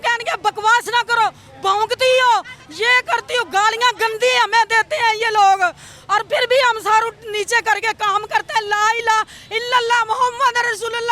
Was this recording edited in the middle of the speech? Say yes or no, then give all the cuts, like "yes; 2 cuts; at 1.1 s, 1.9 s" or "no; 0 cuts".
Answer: no; 0 cuts